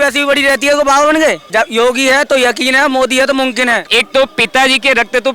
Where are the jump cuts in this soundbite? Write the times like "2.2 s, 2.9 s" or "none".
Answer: 1.4 s, 3.8 s

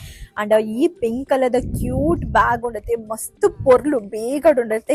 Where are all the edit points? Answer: none

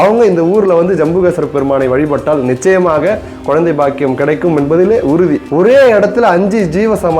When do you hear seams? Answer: 5.4 s

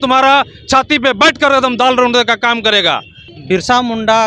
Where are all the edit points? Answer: 3.3 s

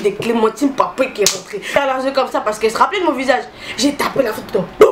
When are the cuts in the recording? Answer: 1.8 s

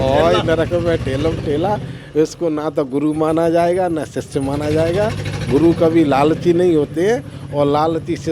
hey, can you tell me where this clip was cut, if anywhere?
none

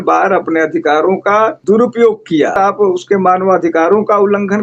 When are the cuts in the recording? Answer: 1.6 s, 2.6 s

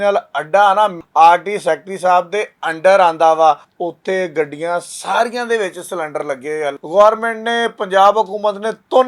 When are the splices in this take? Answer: 1.0 s, 3.7 s, 6.7 s

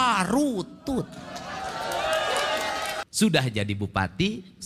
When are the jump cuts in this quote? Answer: 3.0 s

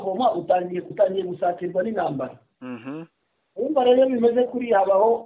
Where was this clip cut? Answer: 0.9 s

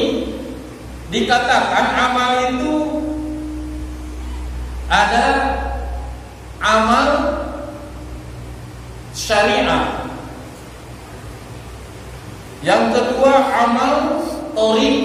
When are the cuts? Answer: none

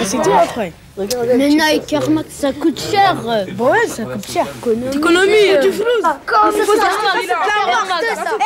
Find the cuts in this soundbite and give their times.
7.0 s

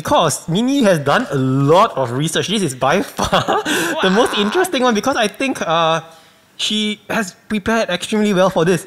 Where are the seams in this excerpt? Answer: none

